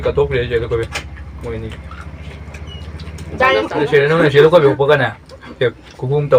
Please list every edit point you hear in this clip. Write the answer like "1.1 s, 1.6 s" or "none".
3.9 s